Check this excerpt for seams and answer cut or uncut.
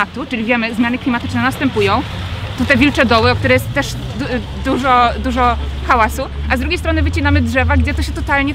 uncut